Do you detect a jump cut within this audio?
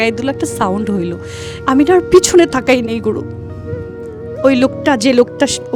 no; 0 cuts

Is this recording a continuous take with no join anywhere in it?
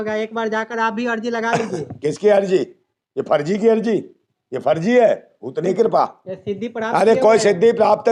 no; 1 cut; at 5.6 s

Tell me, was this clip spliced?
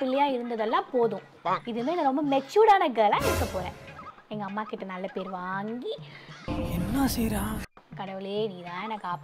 no; 0 cuts

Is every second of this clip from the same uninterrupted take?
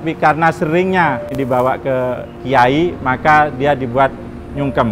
no; 1 cut; at 1.3 s

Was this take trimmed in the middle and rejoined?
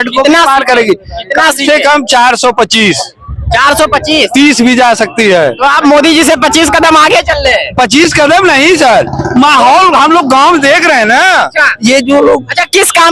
no; 0 cuts

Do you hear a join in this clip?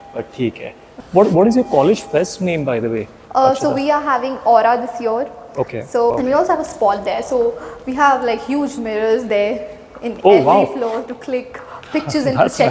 yes; 2 cuts; at 1.0 s, 6.1 s

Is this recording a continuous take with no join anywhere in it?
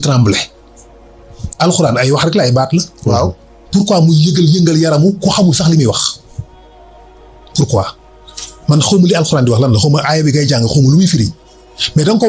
yes; 0 cuts

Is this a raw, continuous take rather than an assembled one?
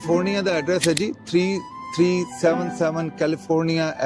yes; 0 cuts

